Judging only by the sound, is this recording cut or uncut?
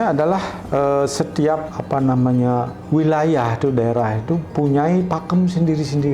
cut